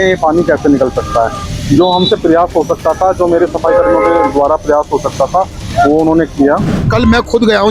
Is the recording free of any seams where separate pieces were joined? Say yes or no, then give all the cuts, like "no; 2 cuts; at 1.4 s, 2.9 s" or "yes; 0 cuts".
no; 1 cut; at 6.8 s